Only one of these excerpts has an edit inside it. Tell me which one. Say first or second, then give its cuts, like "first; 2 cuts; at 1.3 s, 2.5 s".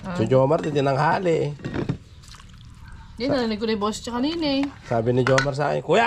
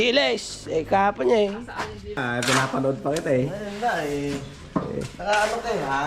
second; 1 cut; at 2.1 s